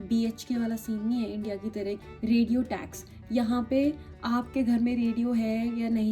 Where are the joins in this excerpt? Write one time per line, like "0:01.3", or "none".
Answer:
0:02.0